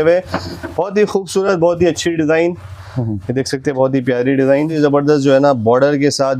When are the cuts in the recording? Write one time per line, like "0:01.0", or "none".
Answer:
0:04.7